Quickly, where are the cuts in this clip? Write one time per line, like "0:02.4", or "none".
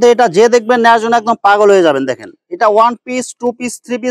none